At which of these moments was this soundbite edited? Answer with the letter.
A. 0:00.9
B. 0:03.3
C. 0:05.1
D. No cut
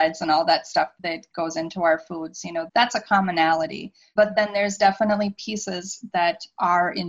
A